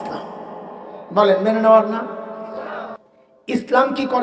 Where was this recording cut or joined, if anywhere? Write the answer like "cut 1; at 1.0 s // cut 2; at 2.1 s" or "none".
cut 1; at 2.8 s